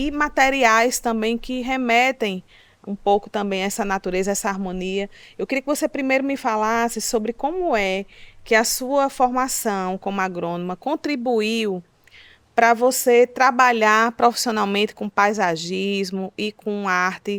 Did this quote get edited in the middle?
no; 0 cuts

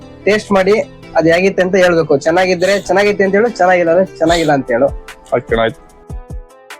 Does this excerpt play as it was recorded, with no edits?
no; 1 cut; at 5.8 s

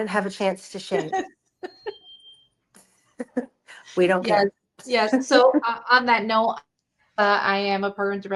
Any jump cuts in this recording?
no; 0 cuts

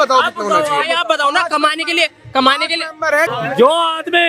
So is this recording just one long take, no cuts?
no; 1 cut; at 3.3 s

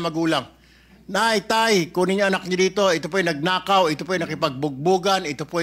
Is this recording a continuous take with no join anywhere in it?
yes; 0 cuts

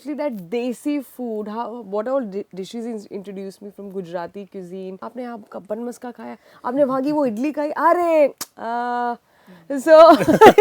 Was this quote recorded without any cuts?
no; 1 cut; at 5.1 s

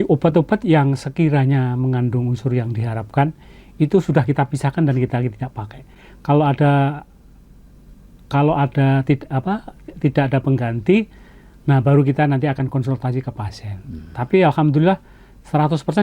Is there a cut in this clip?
no; 0 cuts

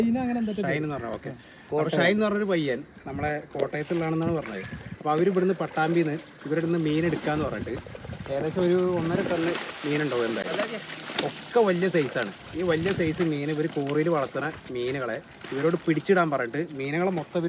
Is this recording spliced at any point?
no; 0 cuts

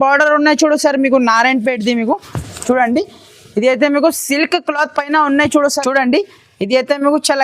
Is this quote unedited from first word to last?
no; 1 cut; at 5.8 s

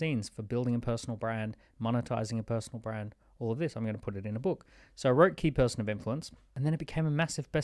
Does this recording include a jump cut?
yes; 1 cut; at 6.5 s

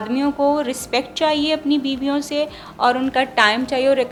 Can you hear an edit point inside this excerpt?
no; 0 cuts

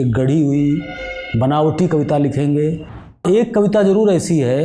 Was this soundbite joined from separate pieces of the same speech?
yes; 1 cut; at 3.2 s

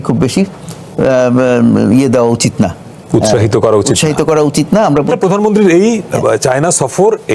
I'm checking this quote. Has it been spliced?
yes; 1 cut; at 5.1 s

